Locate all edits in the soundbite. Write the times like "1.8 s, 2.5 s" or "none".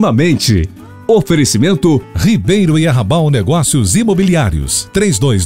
2.1 s